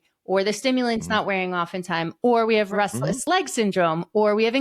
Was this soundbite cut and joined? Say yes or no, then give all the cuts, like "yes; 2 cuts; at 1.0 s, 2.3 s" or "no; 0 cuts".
yes; 1 cut; at 2.8 s